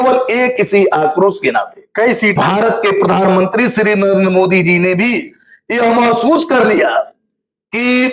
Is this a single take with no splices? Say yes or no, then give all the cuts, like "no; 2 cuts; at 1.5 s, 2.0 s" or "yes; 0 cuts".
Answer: no; 1 cut; at 2.3 s